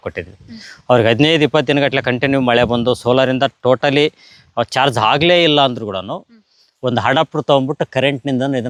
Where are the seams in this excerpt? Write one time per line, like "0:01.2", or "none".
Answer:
none